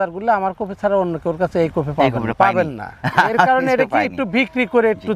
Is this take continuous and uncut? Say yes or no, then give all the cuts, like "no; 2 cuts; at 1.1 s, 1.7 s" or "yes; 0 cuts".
yes; 0 cuts